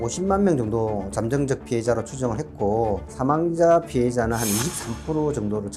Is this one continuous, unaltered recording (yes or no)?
no